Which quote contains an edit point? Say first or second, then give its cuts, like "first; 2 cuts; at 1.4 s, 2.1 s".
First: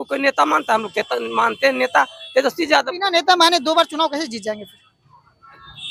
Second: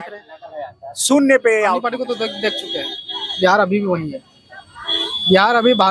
second; 1 cut; at 1.8 s